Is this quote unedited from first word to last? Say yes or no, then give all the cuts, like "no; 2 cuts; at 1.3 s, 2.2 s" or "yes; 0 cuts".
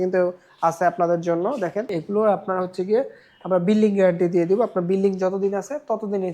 no; 1 cut; at 1.9 s